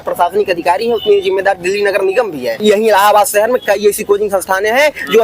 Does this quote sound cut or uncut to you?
cut